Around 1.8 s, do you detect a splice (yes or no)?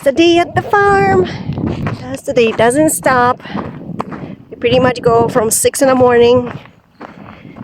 yes